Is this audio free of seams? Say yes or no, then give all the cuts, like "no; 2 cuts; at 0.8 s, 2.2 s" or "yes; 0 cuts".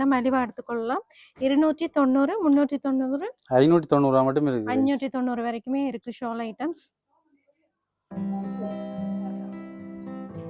yes; 0 cuts